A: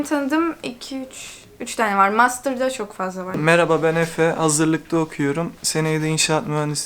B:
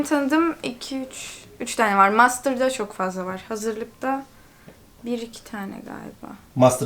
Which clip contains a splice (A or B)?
A